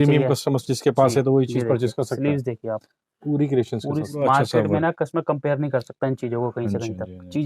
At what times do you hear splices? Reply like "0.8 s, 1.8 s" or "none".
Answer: 4.1 s